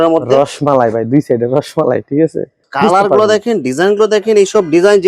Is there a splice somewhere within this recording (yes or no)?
yes